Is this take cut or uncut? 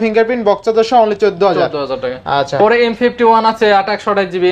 uncut